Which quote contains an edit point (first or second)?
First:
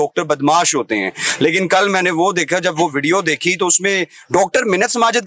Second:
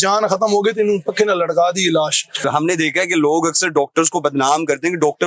second